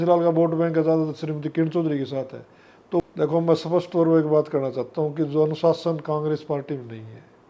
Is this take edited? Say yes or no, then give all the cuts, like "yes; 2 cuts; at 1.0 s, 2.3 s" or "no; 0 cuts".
yes; 1 cut; at 3.0 s